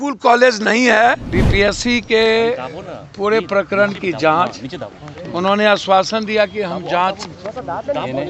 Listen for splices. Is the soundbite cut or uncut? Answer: cut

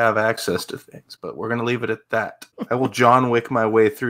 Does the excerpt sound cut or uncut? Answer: cut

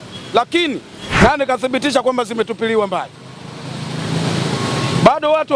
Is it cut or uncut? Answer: cut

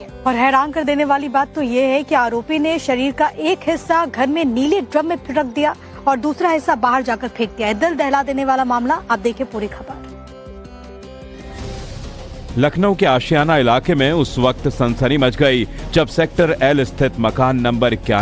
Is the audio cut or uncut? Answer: uncut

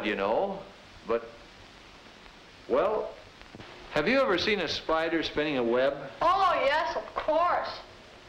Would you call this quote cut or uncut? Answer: cut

